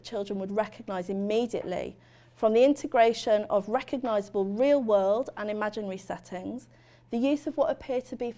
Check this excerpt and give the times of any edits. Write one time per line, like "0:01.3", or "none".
none